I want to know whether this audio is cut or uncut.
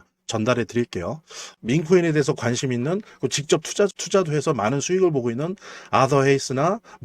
cut